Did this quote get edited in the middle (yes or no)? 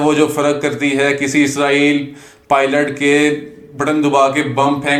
no